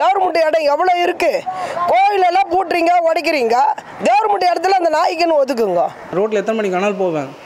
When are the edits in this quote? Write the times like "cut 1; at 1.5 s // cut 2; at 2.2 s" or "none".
cut 1; at 6.0 s